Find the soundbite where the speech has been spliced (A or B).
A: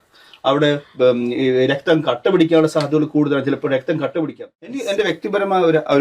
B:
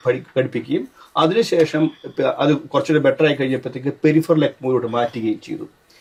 A